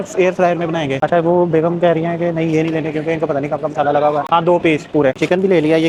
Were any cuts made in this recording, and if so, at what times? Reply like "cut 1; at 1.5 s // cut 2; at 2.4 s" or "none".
none